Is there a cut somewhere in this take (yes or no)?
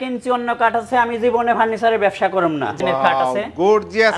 yes